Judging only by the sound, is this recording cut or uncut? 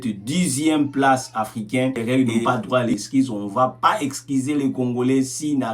cut